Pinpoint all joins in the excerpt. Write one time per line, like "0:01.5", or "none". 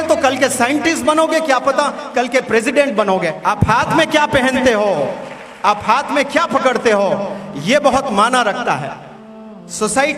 0:03.4